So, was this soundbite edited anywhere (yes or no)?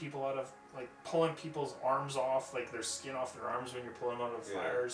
no